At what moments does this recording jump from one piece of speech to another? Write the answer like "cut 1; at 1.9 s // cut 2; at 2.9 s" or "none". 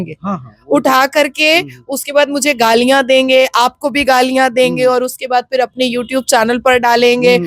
none